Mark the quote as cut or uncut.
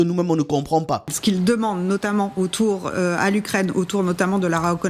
cut